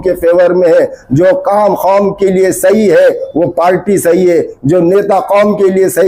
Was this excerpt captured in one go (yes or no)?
yes